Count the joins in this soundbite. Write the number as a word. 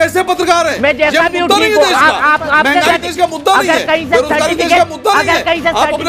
zero